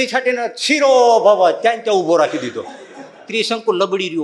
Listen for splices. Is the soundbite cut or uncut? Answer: uncut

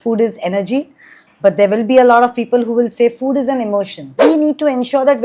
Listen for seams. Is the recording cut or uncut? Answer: cut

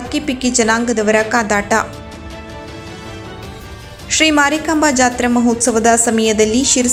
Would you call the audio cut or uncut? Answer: uncut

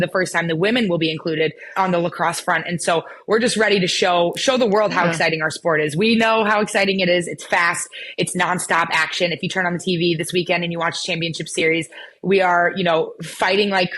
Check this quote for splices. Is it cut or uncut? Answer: cut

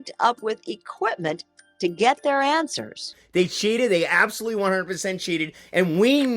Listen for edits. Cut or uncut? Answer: cut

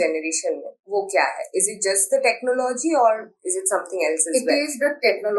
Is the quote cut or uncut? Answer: uncut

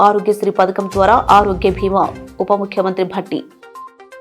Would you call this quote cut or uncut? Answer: uncut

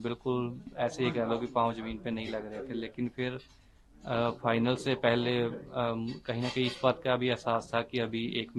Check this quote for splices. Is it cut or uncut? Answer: uncut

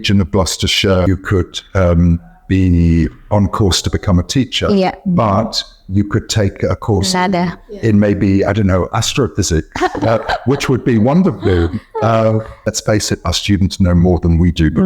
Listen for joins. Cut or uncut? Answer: cut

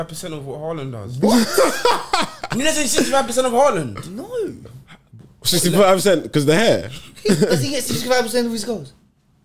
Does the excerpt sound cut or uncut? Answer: uncut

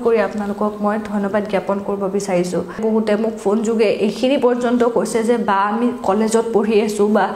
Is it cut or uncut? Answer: cut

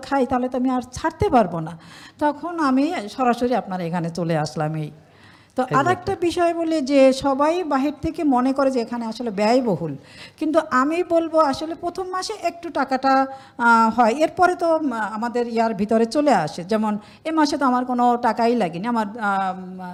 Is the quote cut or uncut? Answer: uncut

